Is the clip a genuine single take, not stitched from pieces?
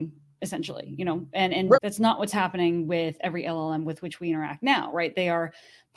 yes; 0 cuts

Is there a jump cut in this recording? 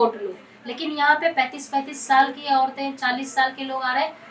no; 0 cuts

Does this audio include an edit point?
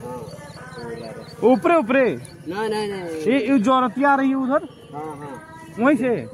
no; 0 cuts

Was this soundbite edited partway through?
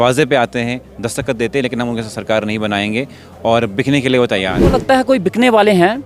yes; 1 cut; at 4.8 s

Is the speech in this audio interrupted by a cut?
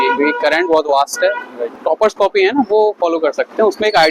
yes; 1 cut; at 1.7 s

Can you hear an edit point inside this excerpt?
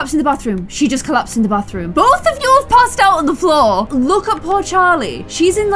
yes; 2 cuts; at 1.9 s, 3.9 s

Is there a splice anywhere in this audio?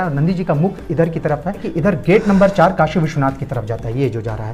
yes; 1 cut; at 1.7 s

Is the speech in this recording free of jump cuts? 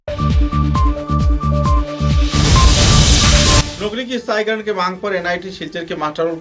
no; 1 cut; at 3.7 s

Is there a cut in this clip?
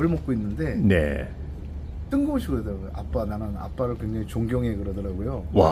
no; 0 cuts

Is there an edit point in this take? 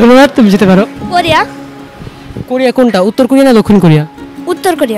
yes; 1 cut; at 1.0 s

